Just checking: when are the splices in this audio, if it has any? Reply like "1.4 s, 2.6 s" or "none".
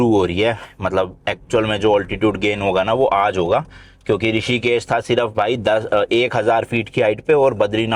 none